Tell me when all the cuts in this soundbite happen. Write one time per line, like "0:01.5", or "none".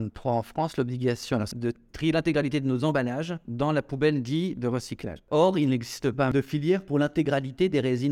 0:01.5
0:05.2
0:06.3

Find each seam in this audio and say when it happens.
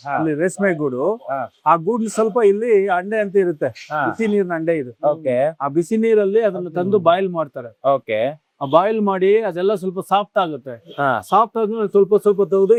none

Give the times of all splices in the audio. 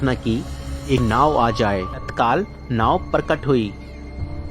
0:01.0
0:02.0

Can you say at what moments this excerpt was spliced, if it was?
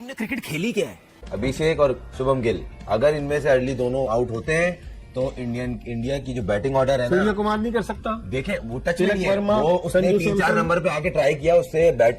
0:01.3

